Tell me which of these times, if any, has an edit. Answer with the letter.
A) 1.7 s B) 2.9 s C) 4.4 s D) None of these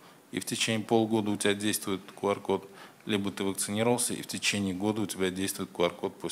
D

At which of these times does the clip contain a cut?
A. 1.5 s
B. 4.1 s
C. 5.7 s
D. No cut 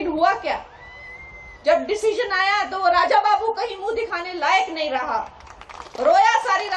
D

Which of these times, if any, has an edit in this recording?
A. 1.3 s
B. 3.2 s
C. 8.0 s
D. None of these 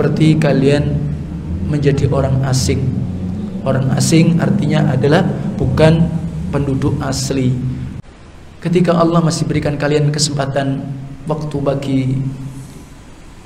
C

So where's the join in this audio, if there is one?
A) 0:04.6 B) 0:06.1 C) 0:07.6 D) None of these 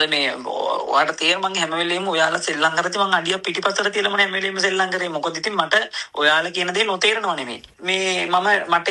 C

